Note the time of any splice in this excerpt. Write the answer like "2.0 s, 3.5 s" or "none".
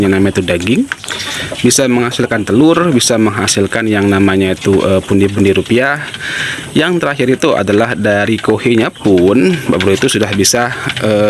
none

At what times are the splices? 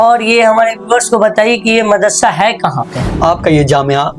3.1 s

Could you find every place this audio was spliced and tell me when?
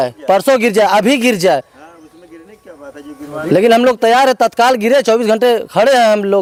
none

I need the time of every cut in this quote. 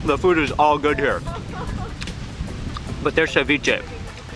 none

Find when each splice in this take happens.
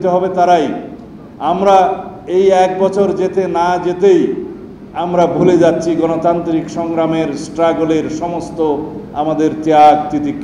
none

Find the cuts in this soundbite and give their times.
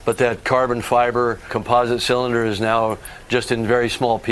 1.5 s

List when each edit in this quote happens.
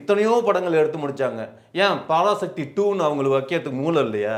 none

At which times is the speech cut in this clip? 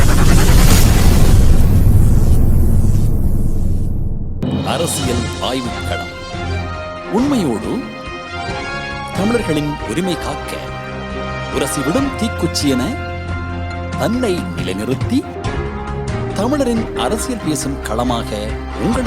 4.4 s

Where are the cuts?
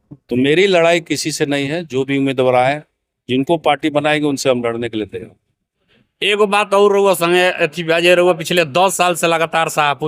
none

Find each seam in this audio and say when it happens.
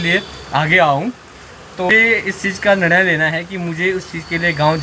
1.9 s

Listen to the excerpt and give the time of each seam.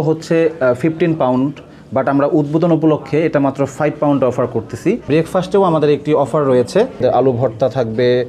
5.1 s, 7.0 s

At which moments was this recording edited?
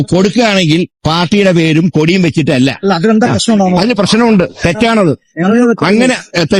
none

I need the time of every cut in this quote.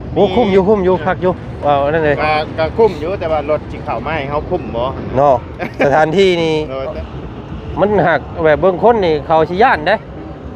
7.0 s

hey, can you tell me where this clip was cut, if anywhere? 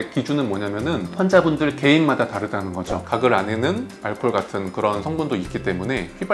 3.0 s

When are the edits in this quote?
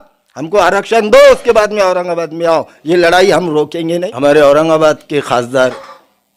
4.0 s

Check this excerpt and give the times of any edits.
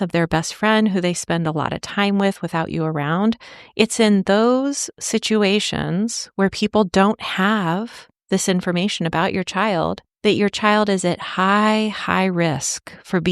10.1 s

